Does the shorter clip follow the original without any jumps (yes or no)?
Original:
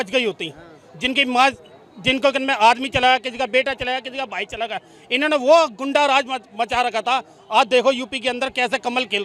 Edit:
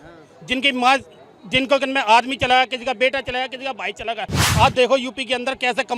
no